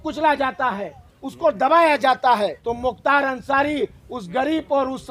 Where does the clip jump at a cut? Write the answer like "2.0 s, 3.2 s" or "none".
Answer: 2.6 s